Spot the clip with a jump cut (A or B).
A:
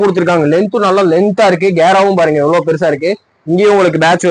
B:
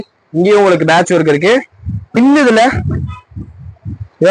B